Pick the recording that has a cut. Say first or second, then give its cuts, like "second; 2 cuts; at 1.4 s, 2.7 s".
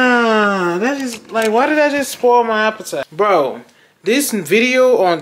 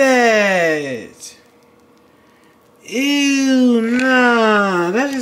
first; 1 cut; at 3.1 s